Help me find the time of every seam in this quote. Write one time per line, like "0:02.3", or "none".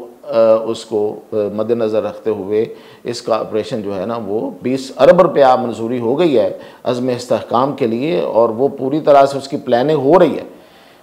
none